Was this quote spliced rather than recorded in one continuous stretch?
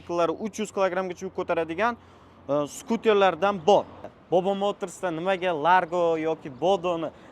yes; 1 cut; at 4.0 s

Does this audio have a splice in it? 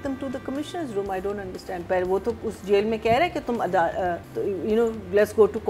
yes; 1 cut; at 4.3 s

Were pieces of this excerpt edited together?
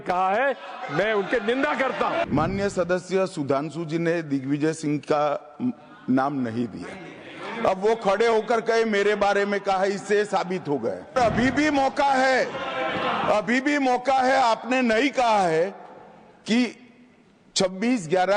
yes; 2 cuts; at 2.3 s, 11.2 s

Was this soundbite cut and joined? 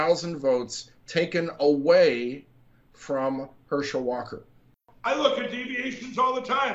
yes; 1 cut; at 4.9 s

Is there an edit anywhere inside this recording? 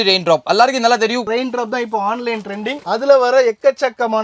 yes; 1 cut; at 1.2 s

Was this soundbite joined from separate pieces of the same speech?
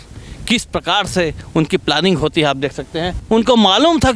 yes; 1 cut; at 3.2 s

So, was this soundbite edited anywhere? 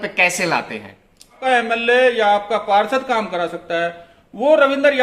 yes; 1 cut; at 1.4 s

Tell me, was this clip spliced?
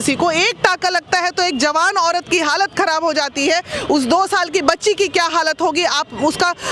no; 0 cuts

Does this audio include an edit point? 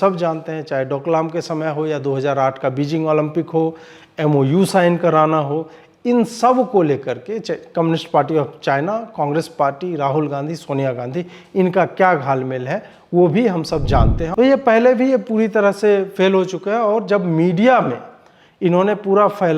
yes; 1 cut; at 14.2 s

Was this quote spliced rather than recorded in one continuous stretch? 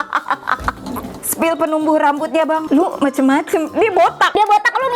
yes; 1 cut; at 1.3 s

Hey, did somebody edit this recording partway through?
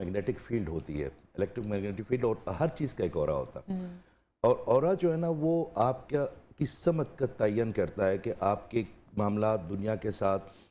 no; 0 cuts

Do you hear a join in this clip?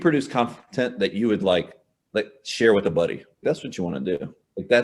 no; 0 cuts

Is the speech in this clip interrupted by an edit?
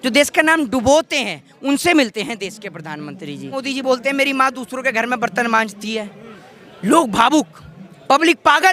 yes; 1 cut; at 3.6 s

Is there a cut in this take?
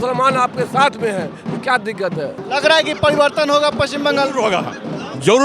yes; 1 cut; at 2.4 s

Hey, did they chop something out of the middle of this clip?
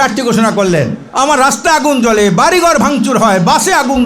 yes; 1 cut; at 1.0 s

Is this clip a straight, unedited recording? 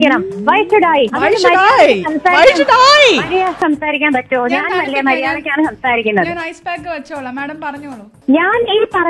no; 3 cuts; at 1.1 s, 3.6 s, 8.1 s

